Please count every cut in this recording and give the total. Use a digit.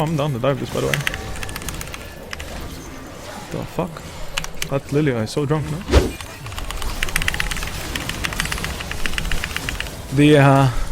1